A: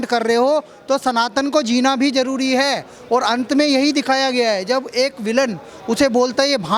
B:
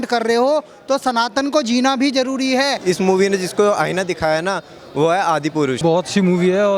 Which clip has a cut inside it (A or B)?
B